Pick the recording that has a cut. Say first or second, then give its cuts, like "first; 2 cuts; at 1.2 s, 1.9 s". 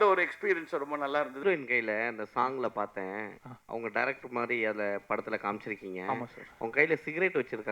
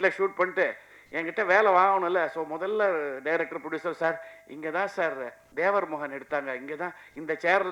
first; 1 cut; at 1.4 s